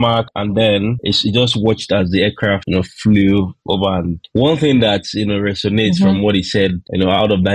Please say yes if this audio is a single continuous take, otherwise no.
yes